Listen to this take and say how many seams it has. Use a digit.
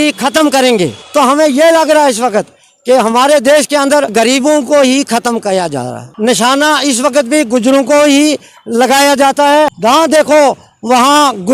4